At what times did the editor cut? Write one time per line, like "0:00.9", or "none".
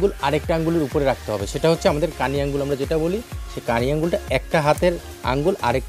none